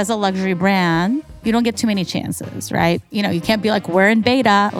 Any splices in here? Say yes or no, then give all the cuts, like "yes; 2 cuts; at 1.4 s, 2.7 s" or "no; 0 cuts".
yes; 2 cuts; at 1.3 s, 3.0 s